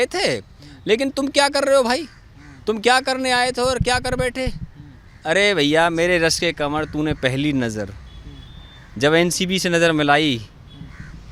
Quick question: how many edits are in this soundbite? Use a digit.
0